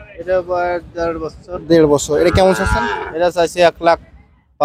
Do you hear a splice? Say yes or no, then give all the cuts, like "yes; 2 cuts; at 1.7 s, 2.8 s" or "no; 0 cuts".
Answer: no; 0 cuts